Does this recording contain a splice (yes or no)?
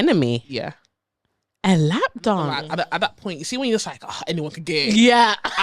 yes